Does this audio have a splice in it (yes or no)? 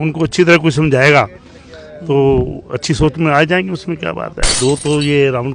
yes